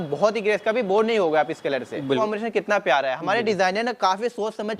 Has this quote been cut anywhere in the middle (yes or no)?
yes